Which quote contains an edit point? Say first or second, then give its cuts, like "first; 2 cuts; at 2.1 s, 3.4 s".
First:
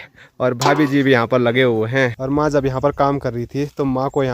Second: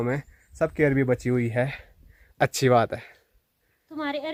first; 1 cut; at 2.2 s